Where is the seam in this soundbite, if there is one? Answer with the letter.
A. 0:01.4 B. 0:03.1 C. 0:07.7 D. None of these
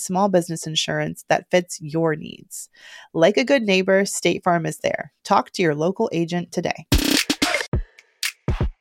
C